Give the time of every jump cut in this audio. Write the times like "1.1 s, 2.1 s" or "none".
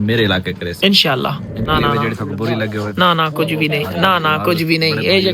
1.7 s